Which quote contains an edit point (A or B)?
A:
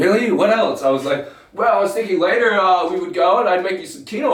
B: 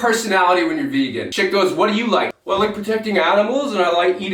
B